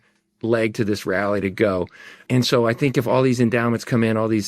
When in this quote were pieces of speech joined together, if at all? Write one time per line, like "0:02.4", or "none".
0:02.1